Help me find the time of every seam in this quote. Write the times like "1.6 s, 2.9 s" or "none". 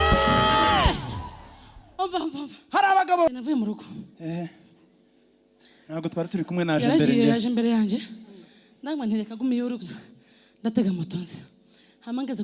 3.3 s